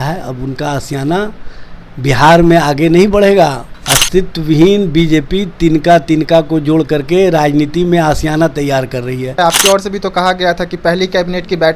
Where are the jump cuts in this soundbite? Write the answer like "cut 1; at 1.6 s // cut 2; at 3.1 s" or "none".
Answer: cut 1; at 3.7 s // cut 2; at 9.4 s